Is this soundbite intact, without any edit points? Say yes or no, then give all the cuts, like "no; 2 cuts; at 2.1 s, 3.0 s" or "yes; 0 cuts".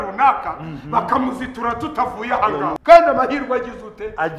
no; 1 cut; at 2.8 s